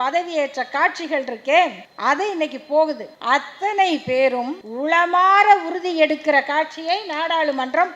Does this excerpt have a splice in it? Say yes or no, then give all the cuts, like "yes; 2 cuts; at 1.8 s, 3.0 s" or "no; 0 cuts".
yes; 3 cuts; at 1.9 s, 3.1 s, 4.6 s